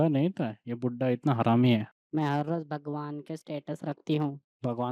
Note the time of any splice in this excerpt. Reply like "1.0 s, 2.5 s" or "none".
2.0 s